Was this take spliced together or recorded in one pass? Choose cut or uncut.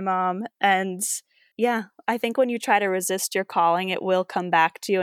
uncut